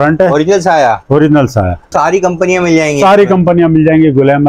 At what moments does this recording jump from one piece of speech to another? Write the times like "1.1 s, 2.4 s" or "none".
1.9 s